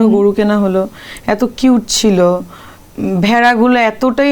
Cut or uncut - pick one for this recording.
uncut